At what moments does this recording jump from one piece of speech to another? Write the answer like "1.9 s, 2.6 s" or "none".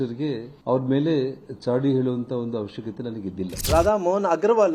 none